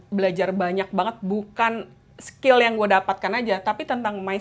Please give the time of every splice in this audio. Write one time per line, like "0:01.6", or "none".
none